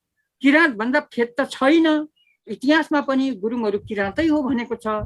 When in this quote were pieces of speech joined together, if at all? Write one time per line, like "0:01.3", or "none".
0:02.5